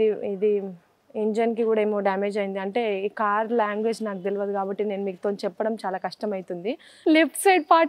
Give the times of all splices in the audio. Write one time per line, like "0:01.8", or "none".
none